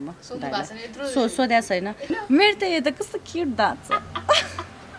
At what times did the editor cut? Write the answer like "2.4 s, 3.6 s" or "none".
2.2 s